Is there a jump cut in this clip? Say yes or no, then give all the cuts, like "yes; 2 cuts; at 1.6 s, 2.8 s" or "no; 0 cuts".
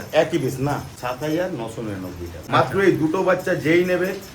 yes; 2 cuts; at 0.9 s, 2.3 s